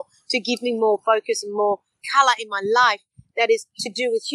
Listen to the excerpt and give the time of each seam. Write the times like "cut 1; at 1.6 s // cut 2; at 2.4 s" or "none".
cut 1; at 2.0 s